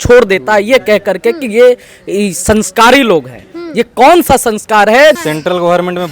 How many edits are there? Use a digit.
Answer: 1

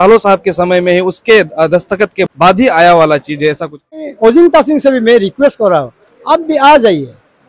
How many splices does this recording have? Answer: 2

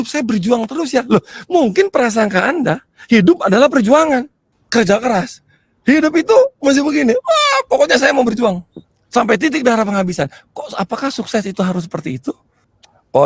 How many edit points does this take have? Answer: 1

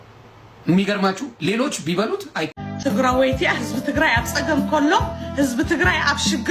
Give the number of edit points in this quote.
1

